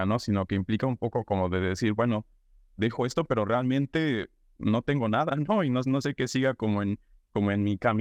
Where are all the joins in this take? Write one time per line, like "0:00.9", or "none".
none